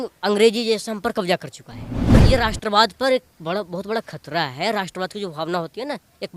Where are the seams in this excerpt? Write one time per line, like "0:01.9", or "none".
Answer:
0:02.2